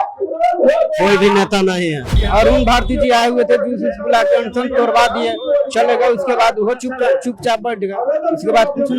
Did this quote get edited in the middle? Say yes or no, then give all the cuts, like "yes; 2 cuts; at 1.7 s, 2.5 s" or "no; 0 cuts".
yes; 1 cut; at 2.1 s